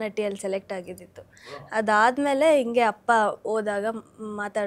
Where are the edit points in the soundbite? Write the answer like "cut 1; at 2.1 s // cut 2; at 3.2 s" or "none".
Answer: none

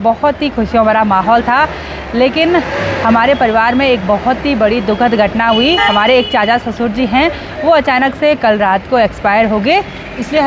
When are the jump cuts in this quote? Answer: none

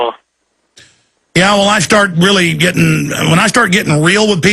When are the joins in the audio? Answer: cut 1; at 3.2 s

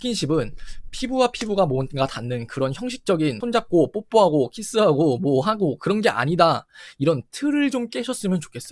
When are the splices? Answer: cut 1; at 3.4 s

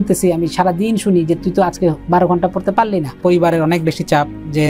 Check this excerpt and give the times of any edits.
cut 1; at 3.2 s

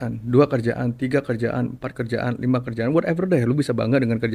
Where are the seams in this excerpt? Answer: none

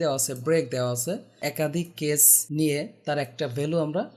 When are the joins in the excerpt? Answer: cut 1; at 1.4 s // cut 2; at 2.4 s

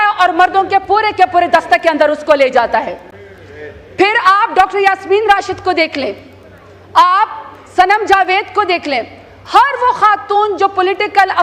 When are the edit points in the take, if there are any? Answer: none

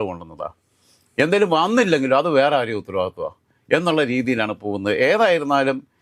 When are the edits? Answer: none

